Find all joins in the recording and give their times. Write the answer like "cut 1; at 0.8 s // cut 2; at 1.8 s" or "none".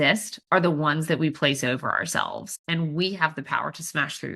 cut 1; at 2.5 s